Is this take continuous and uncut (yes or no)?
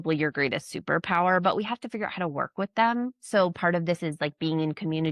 yes